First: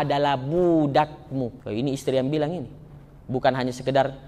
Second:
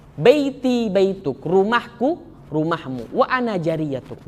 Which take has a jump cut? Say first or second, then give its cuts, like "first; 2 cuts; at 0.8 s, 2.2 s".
first; 1 cut; at 1.6 s